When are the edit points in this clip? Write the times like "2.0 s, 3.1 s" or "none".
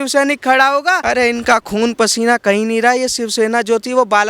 1.0 s